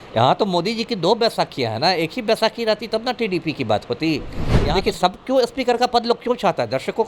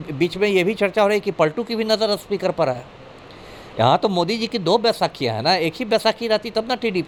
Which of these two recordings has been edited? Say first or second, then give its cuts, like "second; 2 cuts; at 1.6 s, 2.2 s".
first; 1 cut; at 4.5 s